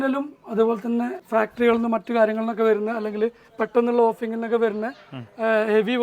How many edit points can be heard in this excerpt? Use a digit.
1